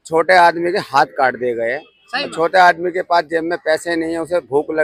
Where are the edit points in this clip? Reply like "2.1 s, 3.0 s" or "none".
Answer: none